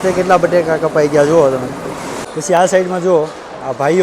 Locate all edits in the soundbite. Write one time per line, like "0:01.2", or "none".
0:02.3